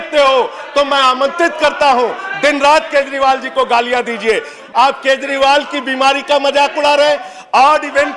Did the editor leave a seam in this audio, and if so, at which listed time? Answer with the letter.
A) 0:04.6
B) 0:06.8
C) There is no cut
A